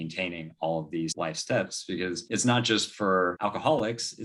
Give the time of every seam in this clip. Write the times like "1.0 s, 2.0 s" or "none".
1.1 s, 2.2 s, 3.3 s